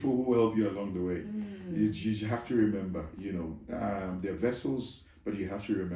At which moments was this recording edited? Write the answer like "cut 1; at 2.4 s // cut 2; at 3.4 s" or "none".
none